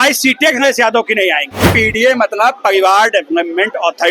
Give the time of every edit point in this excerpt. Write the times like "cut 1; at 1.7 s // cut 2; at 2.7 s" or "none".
cut 1; at 1.7 s